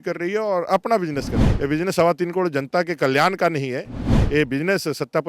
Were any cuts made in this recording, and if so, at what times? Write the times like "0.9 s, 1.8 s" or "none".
1.4 s

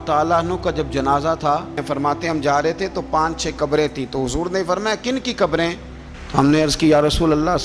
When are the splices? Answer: 1.8 s

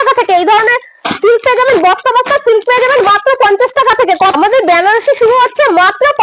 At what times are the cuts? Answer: 4.4 s

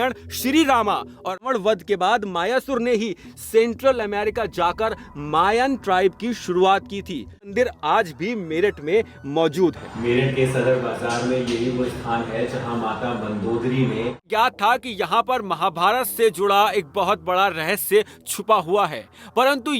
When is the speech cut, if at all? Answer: 1.4 s, 7.5 s, 14.3 s

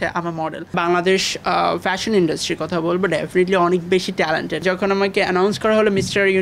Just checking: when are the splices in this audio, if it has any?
0.7 s, 4.6 s

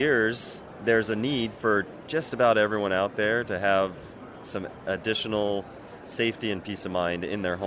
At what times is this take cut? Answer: none

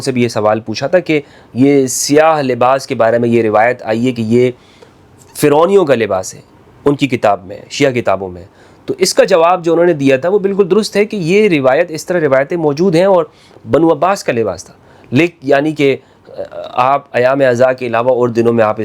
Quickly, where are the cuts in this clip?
none

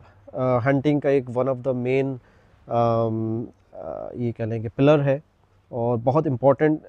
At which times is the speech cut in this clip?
none

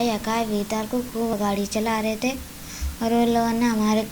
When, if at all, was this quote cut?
1.3 s

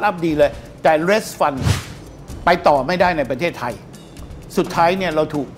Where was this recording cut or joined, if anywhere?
none

